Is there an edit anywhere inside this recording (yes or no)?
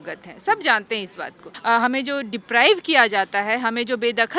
yes